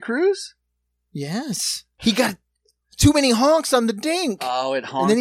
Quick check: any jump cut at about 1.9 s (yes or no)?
yes